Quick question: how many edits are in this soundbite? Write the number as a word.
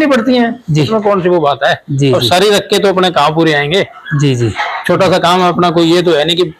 zero